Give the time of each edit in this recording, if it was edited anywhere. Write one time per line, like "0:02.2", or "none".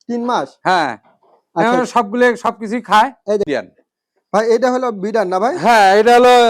0:03.5

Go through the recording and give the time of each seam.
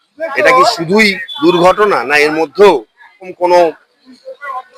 0:03.3

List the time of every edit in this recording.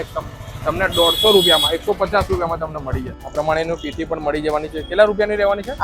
0:03.2

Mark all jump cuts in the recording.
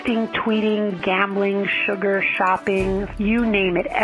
0:01.0
0:03.1

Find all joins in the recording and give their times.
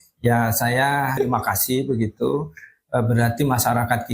0:01.1

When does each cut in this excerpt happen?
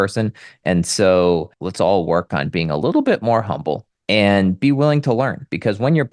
0:01.5
0:03.9

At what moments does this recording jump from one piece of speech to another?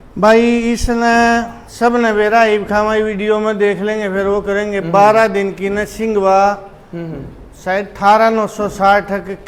none

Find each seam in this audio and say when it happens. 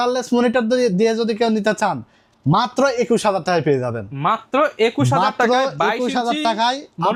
none

